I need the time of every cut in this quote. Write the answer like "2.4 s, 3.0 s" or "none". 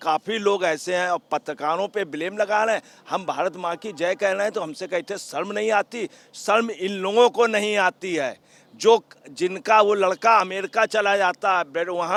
none